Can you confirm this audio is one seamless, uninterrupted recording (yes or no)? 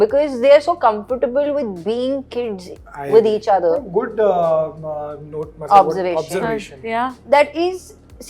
yes